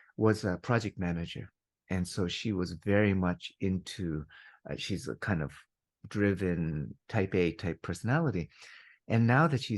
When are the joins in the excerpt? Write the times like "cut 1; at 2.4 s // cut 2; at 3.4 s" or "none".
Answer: cut 1; at 7.0 s